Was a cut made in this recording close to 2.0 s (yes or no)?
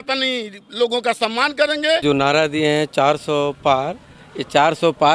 yes